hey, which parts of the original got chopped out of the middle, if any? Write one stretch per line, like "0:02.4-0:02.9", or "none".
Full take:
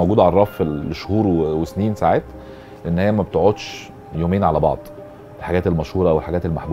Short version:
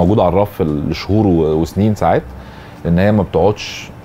none